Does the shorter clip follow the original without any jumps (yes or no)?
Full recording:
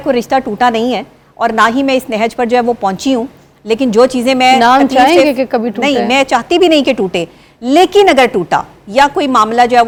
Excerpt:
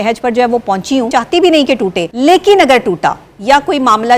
no